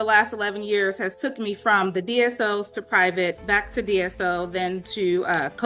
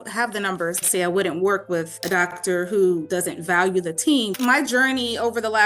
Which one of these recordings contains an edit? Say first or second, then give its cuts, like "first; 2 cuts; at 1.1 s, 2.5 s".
second; 4 cuts; at 0.8 s, 2.3 s, 3.0 s, 4.3 s